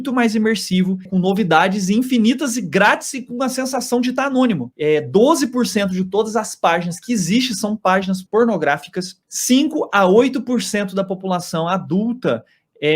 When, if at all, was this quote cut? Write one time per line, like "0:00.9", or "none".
0:01.0
0:04.7
0:08.2

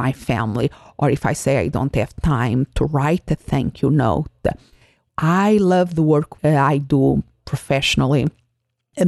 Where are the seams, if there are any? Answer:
0:05.0

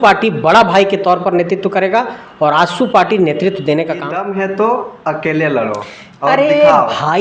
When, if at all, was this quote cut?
0:04.1

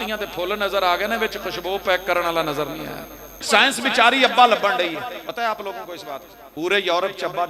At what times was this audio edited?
0:03.4
0:05.3
0:06.4

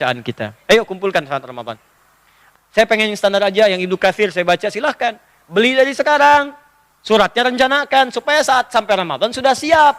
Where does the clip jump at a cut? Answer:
0:02.4

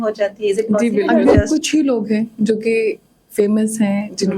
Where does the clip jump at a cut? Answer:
0:01.1

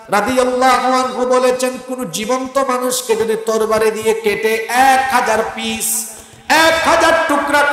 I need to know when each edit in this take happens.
none

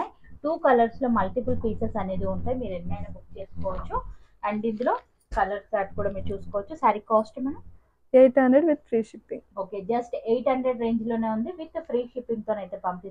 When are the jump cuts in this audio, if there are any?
none

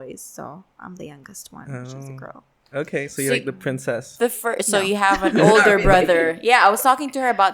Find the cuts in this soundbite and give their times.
none

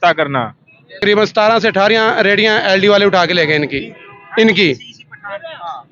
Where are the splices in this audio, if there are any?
0:01.0

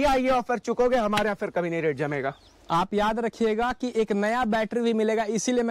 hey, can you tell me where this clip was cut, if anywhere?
none

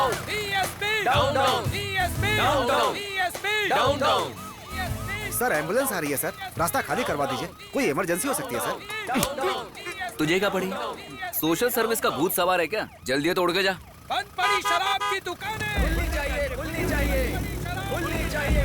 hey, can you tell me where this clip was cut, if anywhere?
0:08.9

